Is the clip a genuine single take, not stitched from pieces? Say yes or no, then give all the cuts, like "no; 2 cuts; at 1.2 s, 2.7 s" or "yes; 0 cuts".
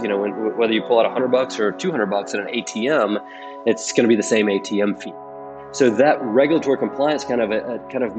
no; 1 cut; at 5.4 s